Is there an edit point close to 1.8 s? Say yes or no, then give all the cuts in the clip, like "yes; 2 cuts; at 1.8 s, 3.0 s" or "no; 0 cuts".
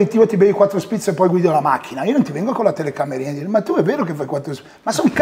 no; 0 cuts